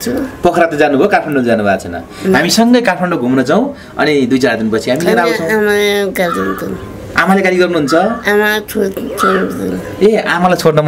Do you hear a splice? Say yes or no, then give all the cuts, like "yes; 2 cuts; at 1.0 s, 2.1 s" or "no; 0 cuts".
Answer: no; 0 cuts